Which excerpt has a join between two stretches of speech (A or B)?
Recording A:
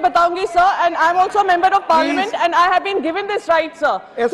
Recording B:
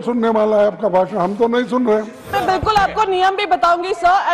B